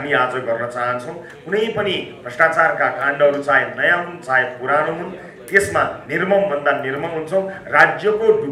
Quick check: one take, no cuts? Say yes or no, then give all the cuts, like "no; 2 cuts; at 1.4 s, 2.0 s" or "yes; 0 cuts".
yes; 0 cuts